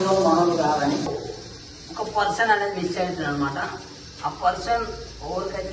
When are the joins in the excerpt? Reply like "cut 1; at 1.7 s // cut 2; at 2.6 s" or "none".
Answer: cut 1; at 1.1 s